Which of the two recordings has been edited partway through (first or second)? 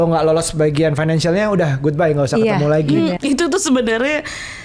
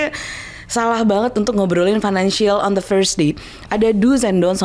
first